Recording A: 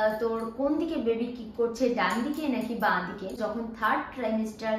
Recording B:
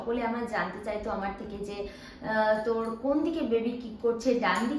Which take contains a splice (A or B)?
A